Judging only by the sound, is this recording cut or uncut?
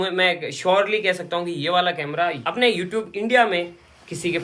uncut